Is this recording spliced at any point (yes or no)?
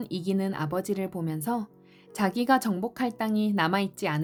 no